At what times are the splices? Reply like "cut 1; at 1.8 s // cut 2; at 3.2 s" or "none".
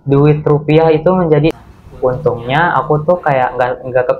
cut 1; at 1.6 s